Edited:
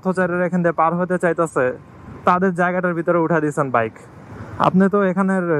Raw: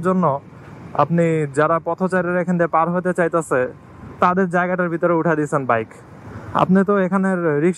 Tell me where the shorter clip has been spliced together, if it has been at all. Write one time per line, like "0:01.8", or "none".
none